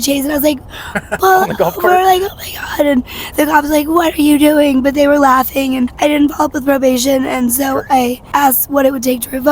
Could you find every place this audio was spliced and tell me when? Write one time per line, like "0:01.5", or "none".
0:05.9
0:08.2